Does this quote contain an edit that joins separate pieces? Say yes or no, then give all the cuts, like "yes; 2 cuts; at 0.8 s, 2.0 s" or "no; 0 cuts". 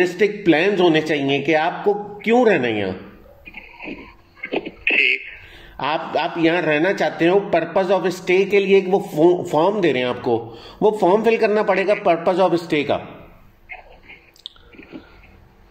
no; 0 cuts